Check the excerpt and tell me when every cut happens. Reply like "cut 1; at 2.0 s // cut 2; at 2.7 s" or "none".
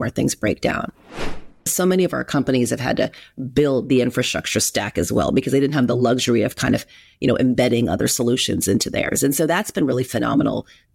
cut 1; at 1.4 s